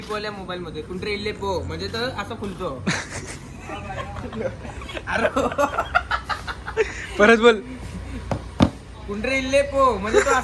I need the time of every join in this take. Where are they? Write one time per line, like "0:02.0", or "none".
none